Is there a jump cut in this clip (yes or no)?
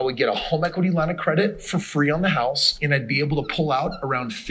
no